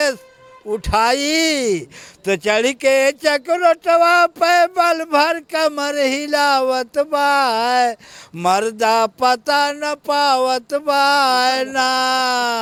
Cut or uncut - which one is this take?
uncut